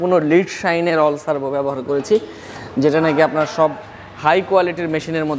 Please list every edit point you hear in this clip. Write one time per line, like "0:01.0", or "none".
none

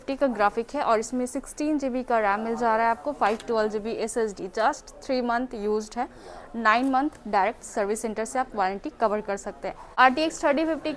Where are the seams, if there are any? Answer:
0:09.8

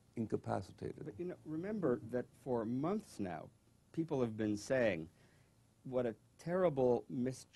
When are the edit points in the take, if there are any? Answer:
none

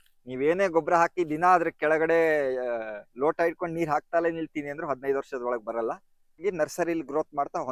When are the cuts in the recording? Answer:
0:06.4

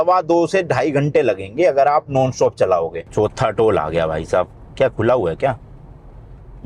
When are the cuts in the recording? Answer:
0:03.0

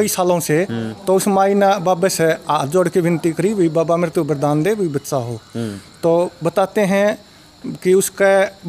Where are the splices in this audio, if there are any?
none

